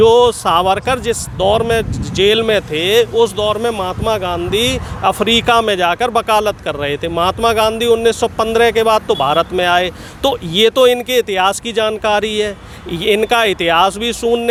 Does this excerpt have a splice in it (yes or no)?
no